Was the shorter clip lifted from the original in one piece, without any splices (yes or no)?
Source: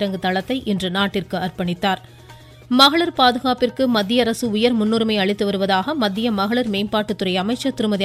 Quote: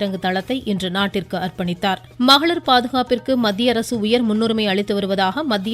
no